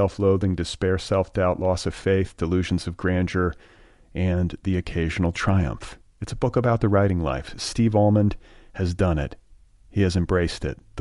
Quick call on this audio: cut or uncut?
uncut